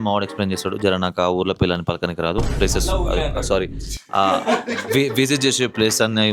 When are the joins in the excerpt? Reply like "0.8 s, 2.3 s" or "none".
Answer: none